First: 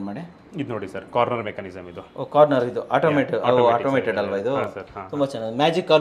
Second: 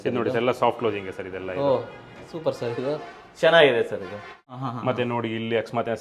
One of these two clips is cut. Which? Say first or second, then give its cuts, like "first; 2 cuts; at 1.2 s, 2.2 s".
second; 1 cut; at 4.5 s